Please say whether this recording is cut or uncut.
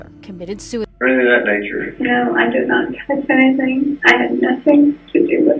cut